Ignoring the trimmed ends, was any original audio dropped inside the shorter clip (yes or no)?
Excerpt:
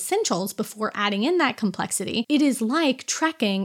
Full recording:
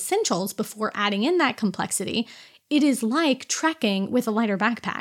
yes